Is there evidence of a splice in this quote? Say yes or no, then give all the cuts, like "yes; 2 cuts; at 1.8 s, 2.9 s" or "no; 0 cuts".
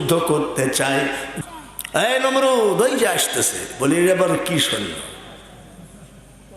yes; 1 cut; at 1.3 s